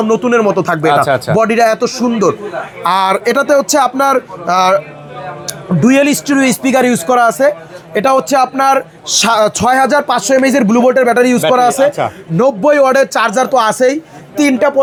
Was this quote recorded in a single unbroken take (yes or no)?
yes